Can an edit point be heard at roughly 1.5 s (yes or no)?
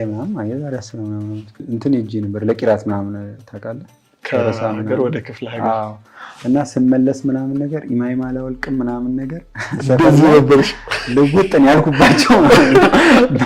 yes